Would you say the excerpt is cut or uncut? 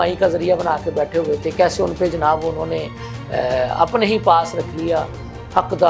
uncut